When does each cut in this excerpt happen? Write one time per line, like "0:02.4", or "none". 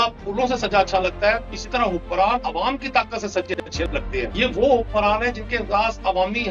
0:01.5
0:04.3